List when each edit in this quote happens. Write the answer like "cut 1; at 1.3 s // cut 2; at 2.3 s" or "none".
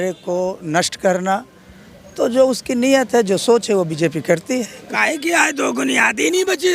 cut 1; at 4.8 s